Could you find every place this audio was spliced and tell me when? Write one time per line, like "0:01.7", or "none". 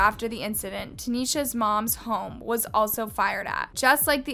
none